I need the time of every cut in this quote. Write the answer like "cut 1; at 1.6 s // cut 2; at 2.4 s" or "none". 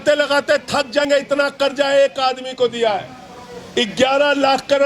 cut 1; at 1.0 s